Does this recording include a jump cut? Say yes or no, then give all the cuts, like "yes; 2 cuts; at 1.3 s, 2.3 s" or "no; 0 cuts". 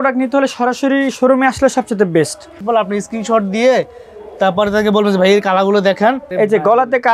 yes; 2 cuts; at 2.5 s, 6.2 s